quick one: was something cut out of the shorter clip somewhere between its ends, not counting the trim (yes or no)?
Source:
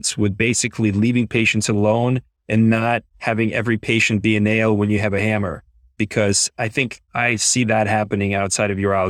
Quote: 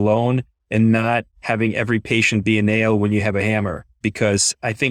yes